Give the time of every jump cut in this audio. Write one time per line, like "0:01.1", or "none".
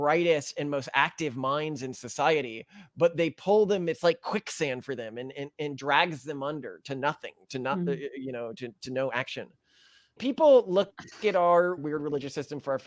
0:10.2
0:11.8

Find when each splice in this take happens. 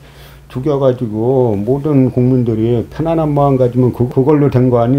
none

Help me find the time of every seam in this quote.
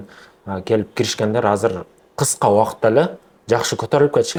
none

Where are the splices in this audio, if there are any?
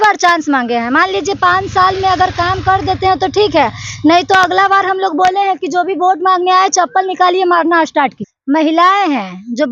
0:08.3

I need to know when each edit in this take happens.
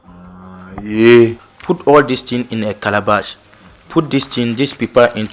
0:01.4

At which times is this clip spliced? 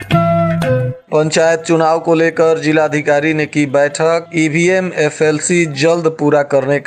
0:00.9

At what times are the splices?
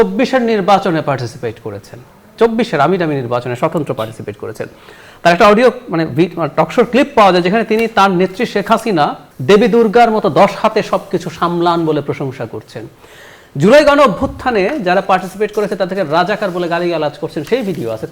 none

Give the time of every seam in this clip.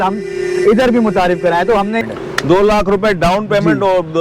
0:02.0

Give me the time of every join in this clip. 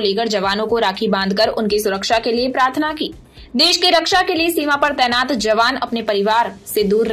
none

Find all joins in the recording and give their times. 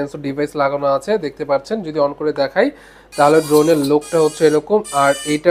none

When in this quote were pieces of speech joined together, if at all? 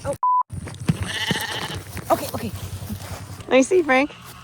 0:03.3

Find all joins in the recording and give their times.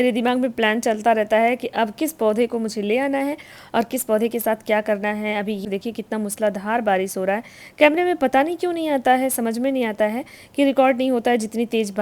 0:05.6

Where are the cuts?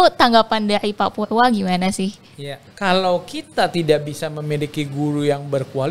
0:02.7

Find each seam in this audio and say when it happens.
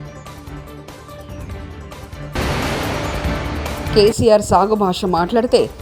0:01.3

